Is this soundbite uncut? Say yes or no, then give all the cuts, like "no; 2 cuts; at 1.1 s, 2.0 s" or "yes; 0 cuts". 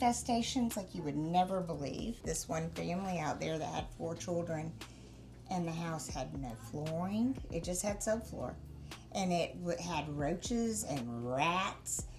no; 1 cut; at 2.2 s